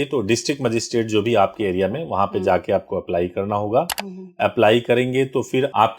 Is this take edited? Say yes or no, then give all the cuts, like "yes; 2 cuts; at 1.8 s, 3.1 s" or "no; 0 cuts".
no; 0 cuts